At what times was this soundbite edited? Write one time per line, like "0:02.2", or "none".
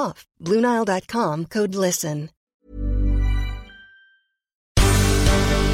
0:02.4
0:04.6